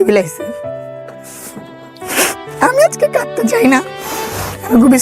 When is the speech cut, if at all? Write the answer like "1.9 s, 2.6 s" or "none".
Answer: none